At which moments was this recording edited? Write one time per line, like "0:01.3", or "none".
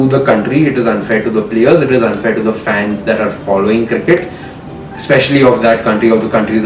none

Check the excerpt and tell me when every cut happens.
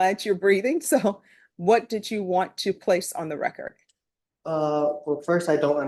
none

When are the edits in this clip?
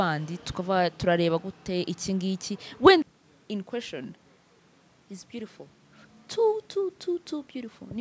0:03.0

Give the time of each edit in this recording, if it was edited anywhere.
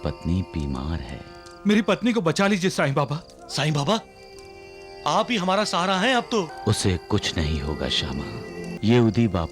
0:06.5
0:08.7

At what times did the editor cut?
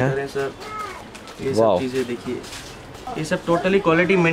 0:03.1

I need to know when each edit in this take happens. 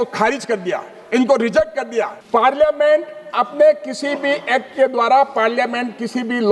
0:02.2

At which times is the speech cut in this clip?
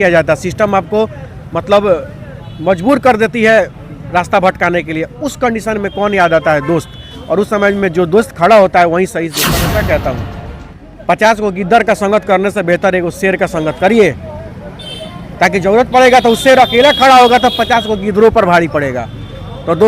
0:09.5

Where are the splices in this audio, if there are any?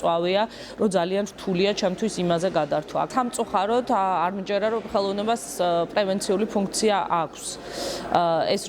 0:03.1

